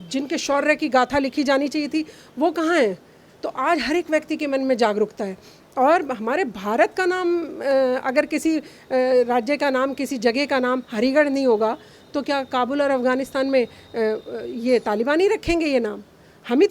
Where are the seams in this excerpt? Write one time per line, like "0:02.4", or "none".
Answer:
none